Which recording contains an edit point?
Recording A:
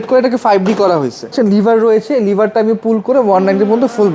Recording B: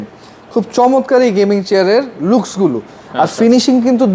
A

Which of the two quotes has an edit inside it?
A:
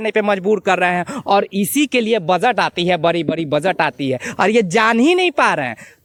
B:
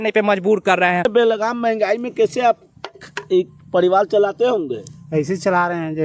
B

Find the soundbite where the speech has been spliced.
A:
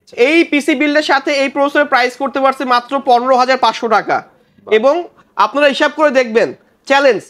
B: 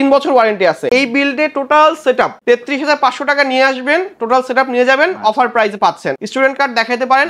B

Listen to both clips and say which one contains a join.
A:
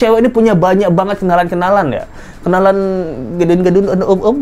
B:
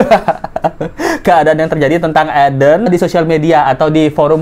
B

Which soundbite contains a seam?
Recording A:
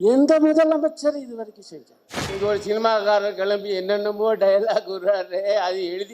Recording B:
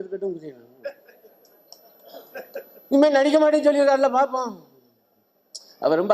A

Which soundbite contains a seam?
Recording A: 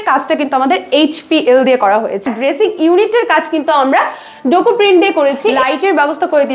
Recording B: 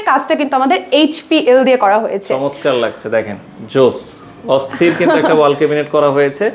A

